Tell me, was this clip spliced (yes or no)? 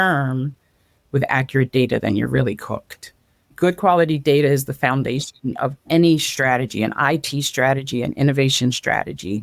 yes